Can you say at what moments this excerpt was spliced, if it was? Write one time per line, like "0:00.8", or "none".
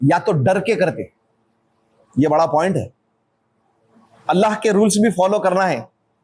none